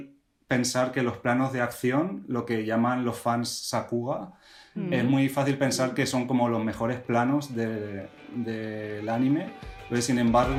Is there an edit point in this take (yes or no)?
no